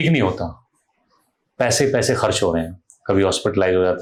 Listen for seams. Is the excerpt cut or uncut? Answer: uncut